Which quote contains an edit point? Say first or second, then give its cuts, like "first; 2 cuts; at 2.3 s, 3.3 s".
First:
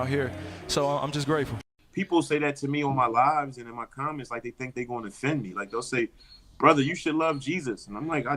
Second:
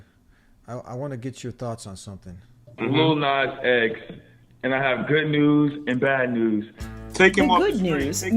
first; 1 cut; at 1.7 s